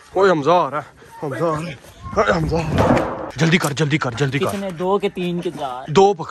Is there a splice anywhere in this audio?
yes; 1 cut; at 3.3 s

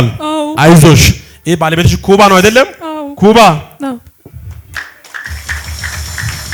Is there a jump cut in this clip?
no; 0 cuts

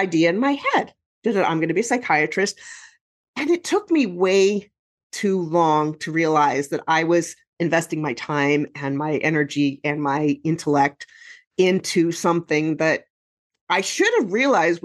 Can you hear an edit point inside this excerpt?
no; 0 cuts

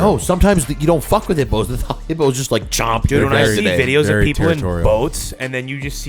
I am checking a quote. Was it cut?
no; 0 cuts

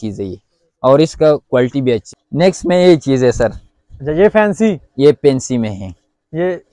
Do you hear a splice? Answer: yes; 1 cut; at 2.1 s

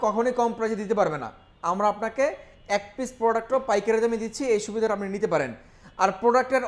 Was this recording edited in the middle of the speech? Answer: no; 0 cuts

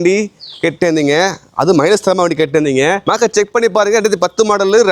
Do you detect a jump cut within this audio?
yes; 1 cut; at 3.0 s

